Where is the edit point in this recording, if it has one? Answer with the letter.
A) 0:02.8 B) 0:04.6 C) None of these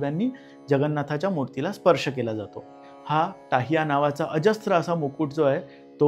A